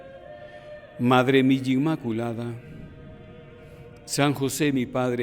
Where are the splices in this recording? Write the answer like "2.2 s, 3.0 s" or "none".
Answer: 1.0 s